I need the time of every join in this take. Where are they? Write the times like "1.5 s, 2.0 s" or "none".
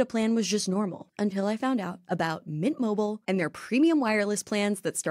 1.0 s

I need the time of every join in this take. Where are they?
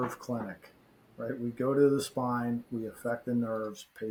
none

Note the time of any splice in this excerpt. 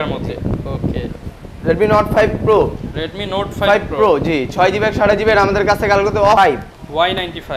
6.4 s

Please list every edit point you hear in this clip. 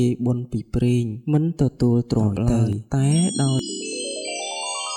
3.6 s

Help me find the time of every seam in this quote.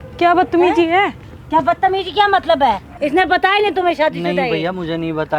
2.9 s

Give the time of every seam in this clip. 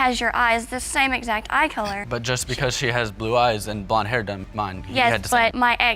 none

